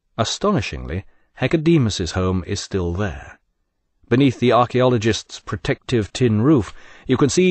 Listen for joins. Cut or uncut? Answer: cut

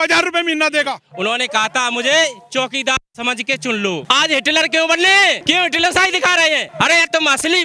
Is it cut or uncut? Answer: cut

